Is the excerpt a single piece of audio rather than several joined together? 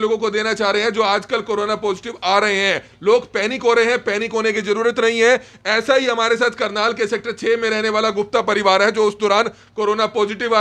yes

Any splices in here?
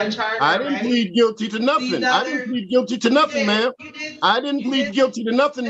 no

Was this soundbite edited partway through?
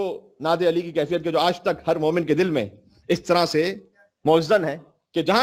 no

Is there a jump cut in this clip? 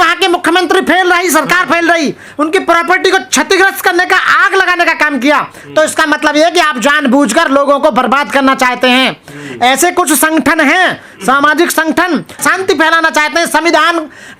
no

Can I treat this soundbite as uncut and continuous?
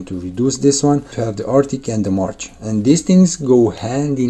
no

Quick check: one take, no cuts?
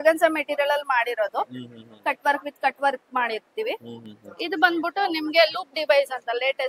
yes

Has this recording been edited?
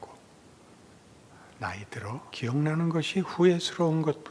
yes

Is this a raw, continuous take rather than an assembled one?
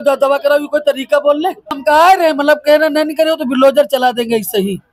no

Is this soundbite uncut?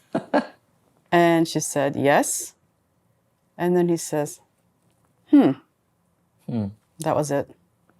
yes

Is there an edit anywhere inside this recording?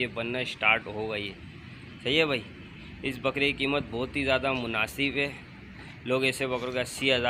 no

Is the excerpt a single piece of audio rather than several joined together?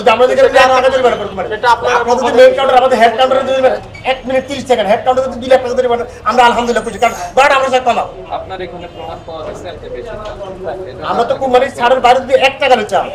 yes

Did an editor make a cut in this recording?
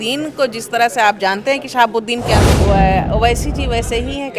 yes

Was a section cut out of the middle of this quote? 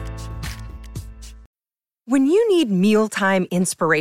yes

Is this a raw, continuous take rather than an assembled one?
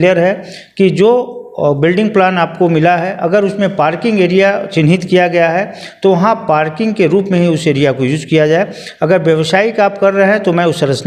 yes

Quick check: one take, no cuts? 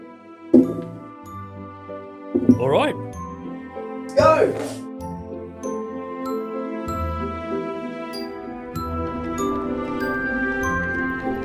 no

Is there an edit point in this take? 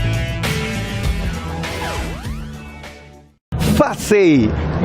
yes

